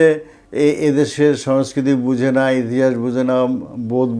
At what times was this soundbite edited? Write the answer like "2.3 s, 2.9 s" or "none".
none